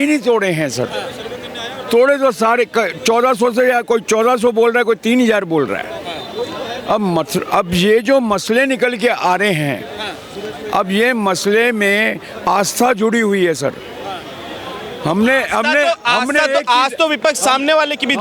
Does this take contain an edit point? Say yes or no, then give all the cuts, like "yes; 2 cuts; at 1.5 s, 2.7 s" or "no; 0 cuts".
no; 0 cuts